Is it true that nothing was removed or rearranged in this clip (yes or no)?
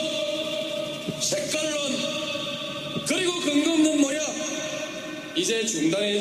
yes